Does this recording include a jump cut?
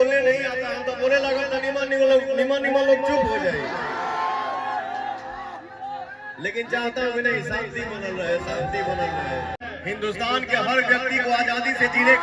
yes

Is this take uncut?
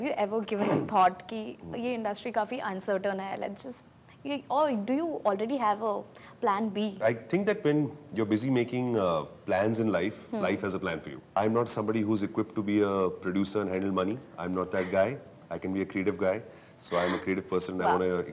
no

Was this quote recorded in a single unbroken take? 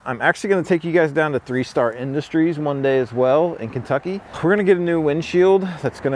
no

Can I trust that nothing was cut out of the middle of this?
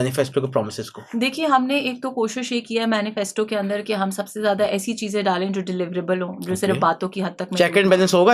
yes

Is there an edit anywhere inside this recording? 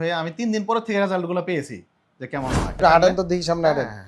yes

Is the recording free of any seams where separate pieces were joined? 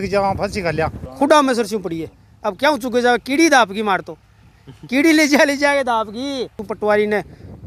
no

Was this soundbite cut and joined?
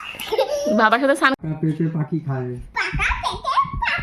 yes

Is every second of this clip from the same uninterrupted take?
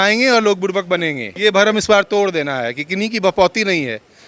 no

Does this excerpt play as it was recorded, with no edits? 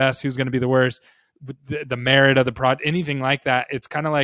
yes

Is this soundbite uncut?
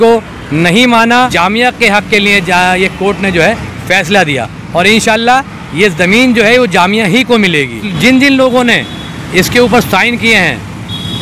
no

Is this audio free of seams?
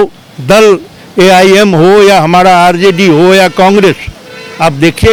yes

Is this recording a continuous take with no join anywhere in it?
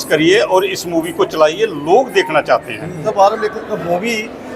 no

